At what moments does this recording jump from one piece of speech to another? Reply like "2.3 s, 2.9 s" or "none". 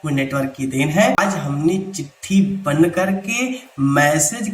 1.2 s